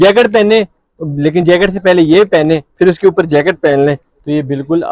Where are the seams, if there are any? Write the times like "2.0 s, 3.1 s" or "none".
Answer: none